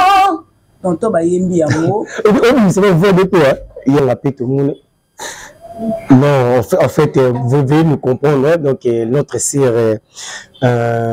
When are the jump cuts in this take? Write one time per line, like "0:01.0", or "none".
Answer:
0:04.0

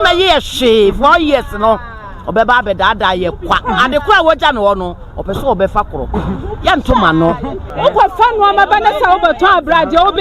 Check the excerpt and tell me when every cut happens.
0:07.6

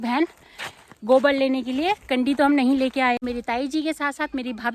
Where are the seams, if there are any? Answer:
0:03.2

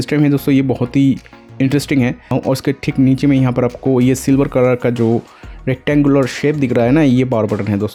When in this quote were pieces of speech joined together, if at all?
none

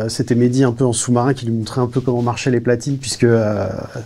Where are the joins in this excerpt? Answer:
none

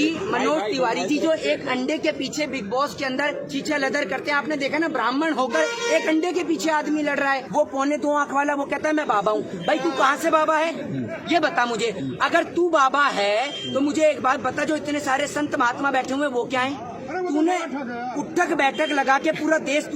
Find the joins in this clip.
0:07.4

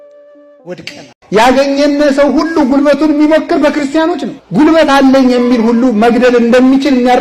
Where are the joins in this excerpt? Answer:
0:01.1

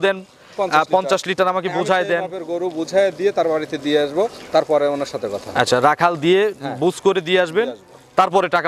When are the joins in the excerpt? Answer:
none

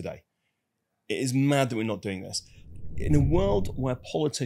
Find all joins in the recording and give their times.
0:02.6

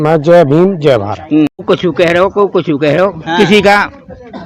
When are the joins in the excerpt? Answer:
0:01.6

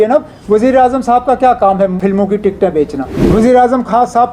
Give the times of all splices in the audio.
0:02.0
0:03.2

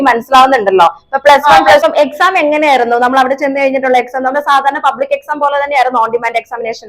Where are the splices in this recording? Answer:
0:01.8

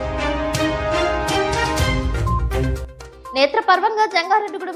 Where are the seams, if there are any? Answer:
0:02.8

